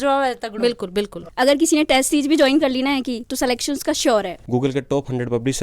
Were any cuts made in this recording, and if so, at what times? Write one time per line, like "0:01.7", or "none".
0:01.2
0:04.4